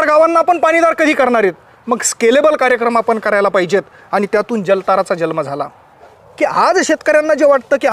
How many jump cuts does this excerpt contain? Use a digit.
1